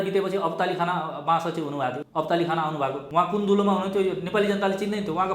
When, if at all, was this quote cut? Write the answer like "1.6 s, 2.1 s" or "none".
2.0 s, 3.0 s